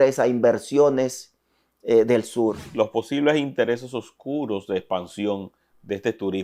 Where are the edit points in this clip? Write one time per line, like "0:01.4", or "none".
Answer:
0:02.7